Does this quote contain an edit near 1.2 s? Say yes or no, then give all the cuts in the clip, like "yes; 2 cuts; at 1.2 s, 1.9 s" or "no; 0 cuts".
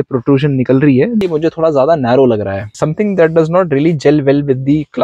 yes; 2 cuts; at 1.2 s, 2.7 s